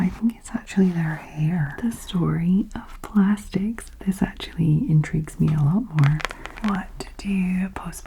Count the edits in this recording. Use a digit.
2